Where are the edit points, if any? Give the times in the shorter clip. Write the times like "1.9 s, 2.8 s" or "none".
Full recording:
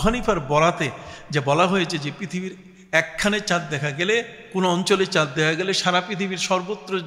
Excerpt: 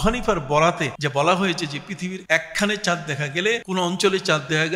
0.9 s, 2.2 s, 3.6 s